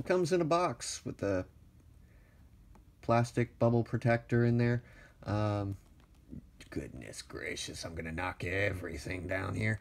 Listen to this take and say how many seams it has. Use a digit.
1